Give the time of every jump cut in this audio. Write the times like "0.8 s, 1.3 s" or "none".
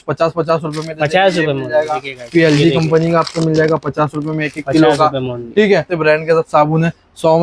5.9 s